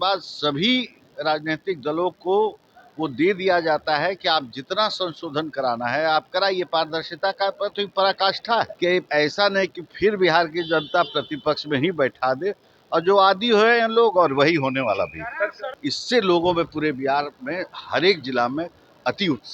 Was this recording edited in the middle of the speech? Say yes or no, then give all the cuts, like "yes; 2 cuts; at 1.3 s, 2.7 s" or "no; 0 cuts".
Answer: yes; 2 cuts; at 8.7 s, 15.7 s